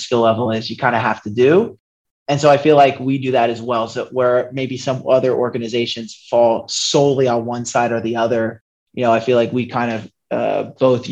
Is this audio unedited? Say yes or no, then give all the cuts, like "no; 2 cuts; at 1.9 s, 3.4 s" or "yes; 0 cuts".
yes; 0 cuts